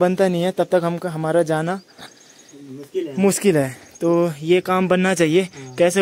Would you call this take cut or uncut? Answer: uncut